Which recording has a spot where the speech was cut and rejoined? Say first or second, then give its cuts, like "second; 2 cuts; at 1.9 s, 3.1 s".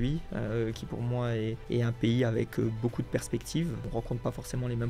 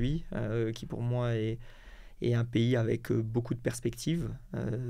first; 2 cuts; at 1.6 s, 3.8 s